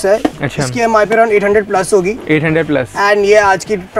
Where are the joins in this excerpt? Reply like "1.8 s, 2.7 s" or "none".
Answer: none